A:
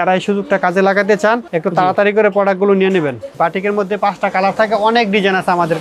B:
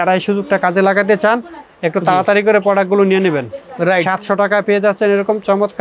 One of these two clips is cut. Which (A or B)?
A